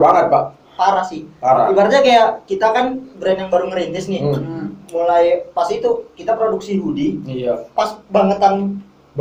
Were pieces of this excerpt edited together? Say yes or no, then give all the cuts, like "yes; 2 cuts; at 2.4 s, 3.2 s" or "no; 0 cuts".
no; 0 cuts